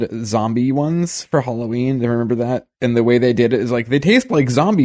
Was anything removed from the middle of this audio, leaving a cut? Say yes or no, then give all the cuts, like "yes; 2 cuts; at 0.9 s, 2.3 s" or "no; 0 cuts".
no; 0 cuts